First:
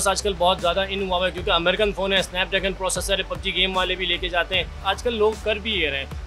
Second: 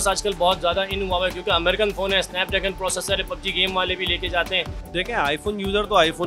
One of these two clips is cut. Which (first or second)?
second